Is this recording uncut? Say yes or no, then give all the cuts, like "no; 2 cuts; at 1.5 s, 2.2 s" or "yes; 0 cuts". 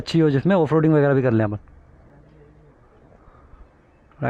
yes; 0 cuts